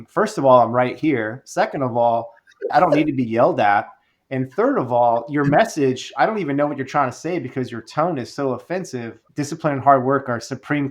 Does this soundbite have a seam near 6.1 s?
no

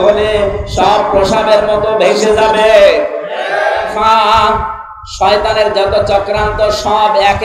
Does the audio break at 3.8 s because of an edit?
yes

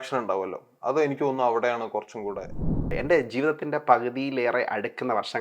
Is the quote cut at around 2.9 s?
yes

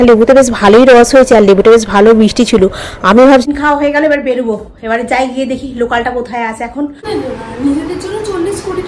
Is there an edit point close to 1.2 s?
no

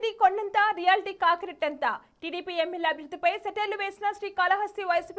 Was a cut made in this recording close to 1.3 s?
no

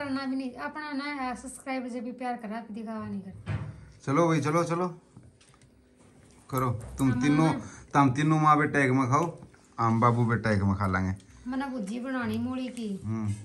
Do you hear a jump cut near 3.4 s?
no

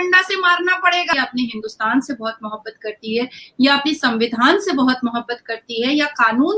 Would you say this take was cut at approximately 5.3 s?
no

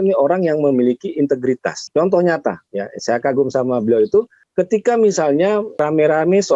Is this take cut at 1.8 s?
yes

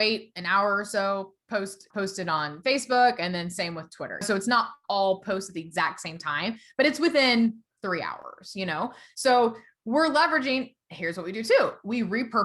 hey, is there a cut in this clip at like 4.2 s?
yes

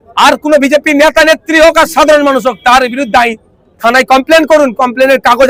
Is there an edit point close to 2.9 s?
no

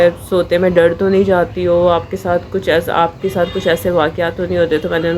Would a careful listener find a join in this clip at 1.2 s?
no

